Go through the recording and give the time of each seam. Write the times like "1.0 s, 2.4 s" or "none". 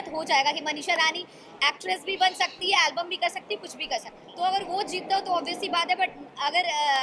4.2 s